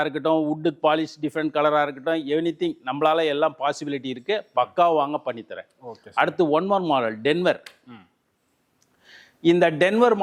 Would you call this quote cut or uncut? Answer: uncut